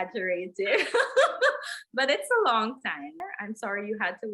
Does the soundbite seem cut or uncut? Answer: cut